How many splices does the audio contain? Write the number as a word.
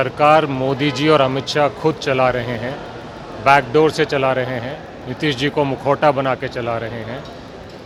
zero